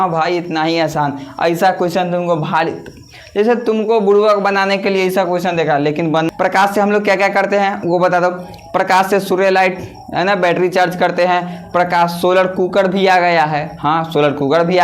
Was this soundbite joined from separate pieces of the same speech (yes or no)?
yes